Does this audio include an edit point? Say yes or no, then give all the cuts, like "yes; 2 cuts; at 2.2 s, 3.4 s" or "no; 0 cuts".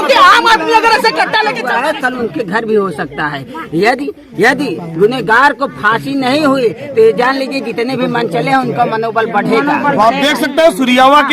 yes; 1 cut; at 1.6 s